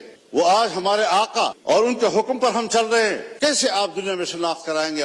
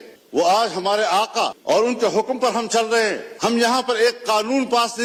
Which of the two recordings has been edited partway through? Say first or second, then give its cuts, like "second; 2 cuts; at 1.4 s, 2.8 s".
first; 1 cut; at 3.3 s